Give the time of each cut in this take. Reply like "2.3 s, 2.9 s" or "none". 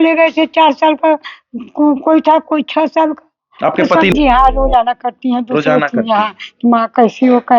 4.1 s